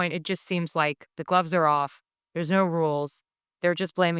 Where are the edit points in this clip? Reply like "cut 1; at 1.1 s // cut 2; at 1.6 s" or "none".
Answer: none